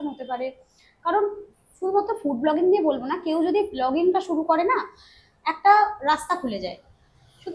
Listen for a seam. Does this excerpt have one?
no; 0 cuts

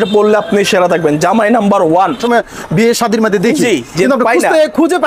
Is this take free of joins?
no; 1 cut; at 2.2 s

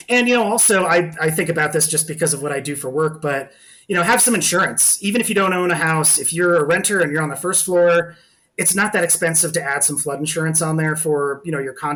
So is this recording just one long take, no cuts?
yes; 0 cuts

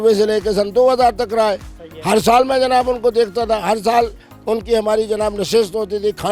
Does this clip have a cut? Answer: no; 0 cuts

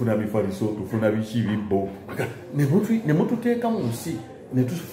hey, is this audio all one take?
no; 1 cut; at 2.0 s

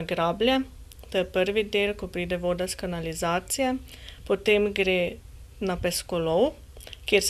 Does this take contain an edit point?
no; 0 cuts

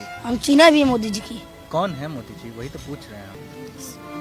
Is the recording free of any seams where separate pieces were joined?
no; 1 cut; at 3.2 s

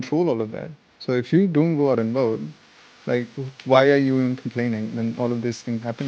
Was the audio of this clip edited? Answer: no; 0 cuts

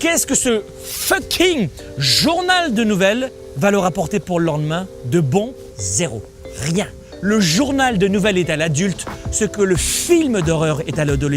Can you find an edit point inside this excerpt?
yes; 3 cuts; at 3.4 s, 5.5 s, 7.0 s

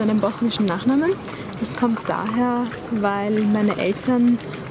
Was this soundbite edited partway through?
no; 0 cuts

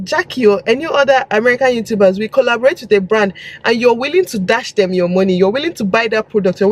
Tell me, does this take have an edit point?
no; 0 cuts

